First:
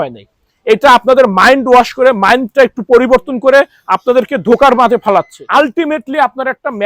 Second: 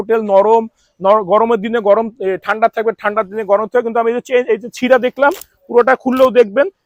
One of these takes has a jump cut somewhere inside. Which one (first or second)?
first